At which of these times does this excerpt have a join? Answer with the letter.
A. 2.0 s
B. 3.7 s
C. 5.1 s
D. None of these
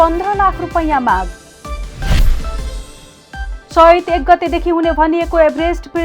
B